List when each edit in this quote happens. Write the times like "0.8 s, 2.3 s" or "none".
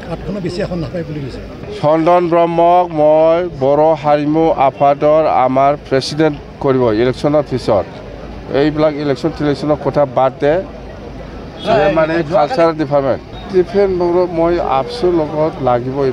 1.6 s, 13.3 s